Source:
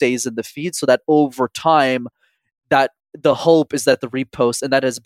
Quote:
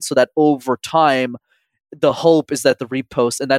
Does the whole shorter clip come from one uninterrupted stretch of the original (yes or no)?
no